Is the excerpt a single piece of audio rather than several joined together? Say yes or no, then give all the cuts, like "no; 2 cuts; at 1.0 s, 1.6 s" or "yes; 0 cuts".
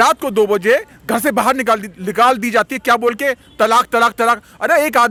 yes; 0 cuts